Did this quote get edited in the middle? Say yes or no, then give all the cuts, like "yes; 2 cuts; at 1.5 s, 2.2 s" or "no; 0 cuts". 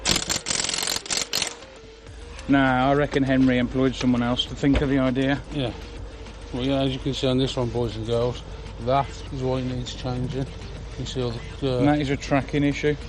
no; 0 cuts